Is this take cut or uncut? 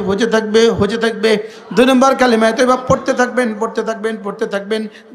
cut